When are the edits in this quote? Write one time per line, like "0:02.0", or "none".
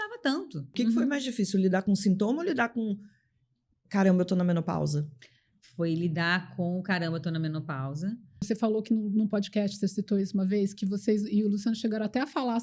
0:00.8
0:08.4

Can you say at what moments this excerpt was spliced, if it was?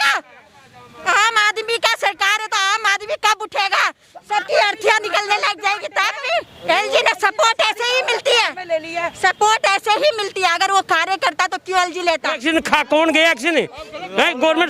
0:06.2
0:12.4

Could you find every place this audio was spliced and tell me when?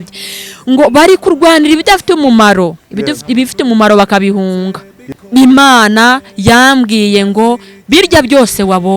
0:05.1

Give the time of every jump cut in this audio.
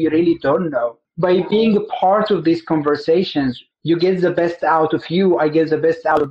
0:01.0
0:03.6

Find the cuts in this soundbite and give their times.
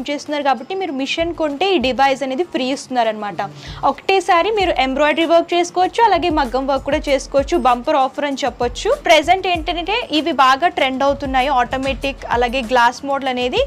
0:09.0

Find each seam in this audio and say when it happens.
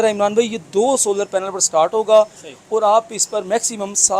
none

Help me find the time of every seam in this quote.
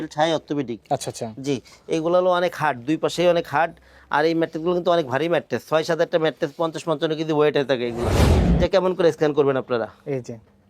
0:08.2

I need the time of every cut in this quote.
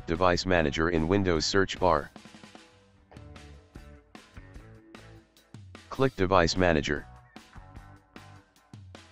0:02.1
0:05.9
0:07.0

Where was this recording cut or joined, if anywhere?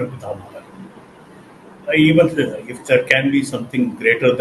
0:01.1

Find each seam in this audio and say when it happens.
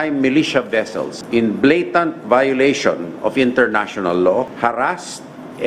0:01.2
0:04.5

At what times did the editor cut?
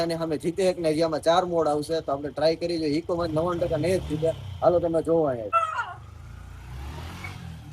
0:05.5

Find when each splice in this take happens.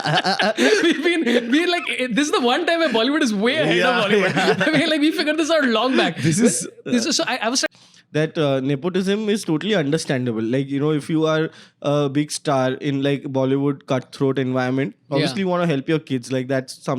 0:07.6

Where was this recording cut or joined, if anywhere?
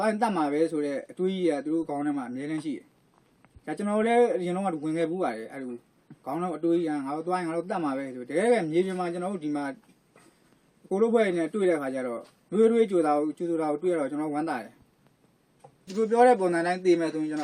0:15.9

